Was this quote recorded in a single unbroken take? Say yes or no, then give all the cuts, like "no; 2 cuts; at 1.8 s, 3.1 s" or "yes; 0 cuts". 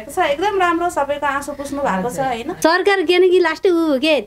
no; 1 cut; at 2.5 s